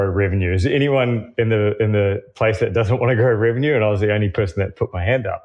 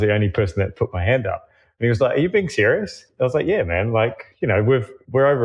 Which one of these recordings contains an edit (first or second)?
second